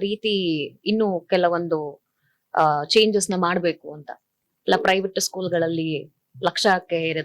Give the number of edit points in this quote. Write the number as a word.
one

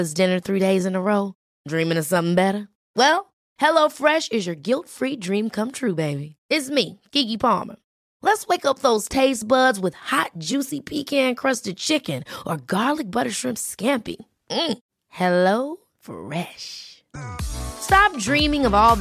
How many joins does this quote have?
zero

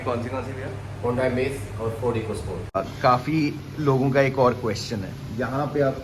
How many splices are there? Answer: one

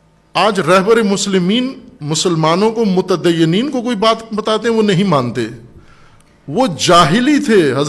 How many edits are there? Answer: zero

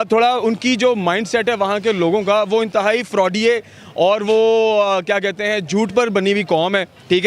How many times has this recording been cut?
zero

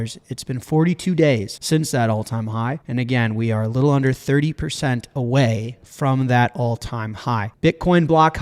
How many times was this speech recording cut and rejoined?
three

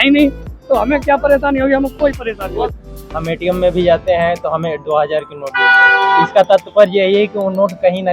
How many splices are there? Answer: one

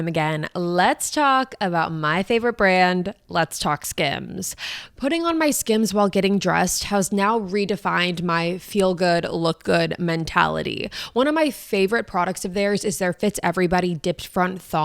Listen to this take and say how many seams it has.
one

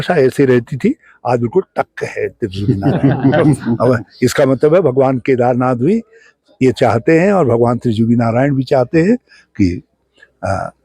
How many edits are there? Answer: zero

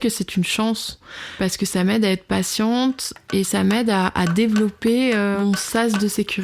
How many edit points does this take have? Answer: two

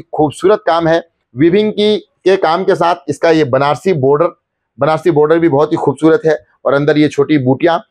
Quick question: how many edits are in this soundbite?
one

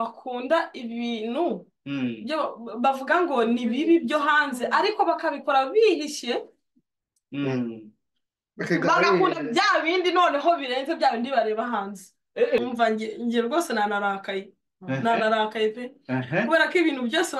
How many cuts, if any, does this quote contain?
one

